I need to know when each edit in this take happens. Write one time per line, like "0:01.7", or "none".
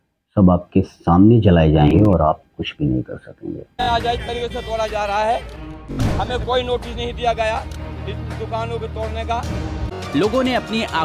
0:01.9